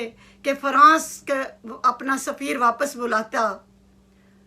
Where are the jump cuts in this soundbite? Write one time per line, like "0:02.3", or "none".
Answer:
none